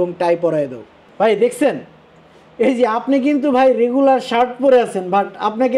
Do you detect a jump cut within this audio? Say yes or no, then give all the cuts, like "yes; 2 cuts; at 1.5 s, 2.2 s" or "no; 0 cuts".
yes; 1 cut; at 1.0 s